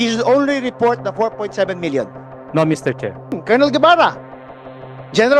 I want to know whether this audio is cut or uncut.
cut